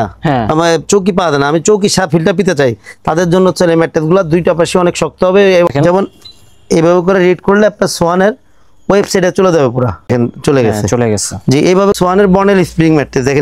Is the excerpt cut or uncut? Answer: cut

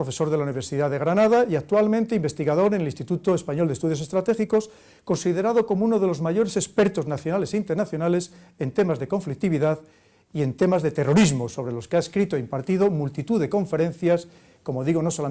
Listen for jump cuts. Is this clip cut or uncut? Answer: cut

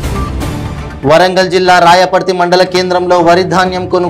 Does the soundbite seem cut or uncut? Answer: uncut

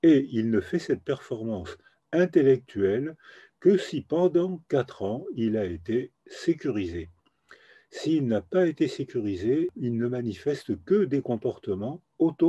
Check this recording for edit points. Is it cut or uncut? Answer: cut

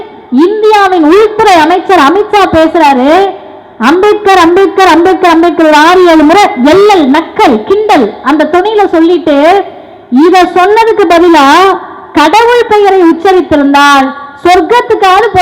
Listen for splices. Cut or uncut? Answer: uncut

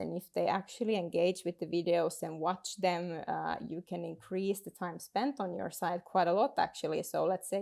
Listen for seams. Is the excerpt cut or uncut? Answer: uncut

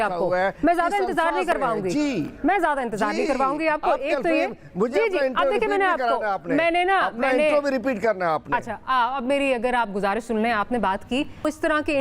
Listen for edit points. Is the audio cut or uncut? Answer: uncut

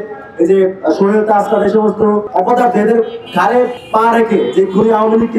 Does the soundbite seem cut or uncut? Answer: cut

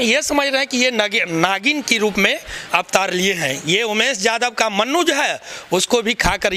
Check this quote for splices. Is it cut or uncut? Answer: uncut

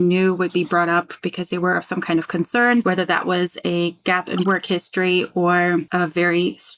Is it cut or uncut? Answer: cut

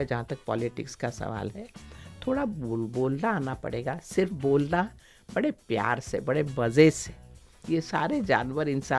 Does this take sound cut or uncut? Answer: cut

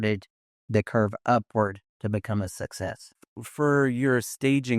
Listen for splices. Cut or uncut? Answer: cut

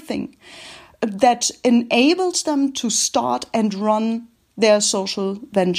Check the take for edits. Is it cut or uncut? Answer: uncut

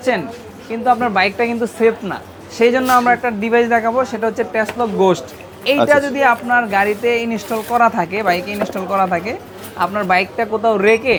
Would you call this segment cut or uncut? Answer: uncut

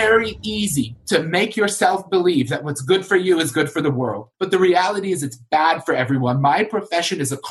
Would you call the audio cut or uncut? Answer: cut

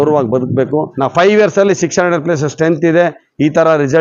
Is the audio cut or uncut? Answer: cut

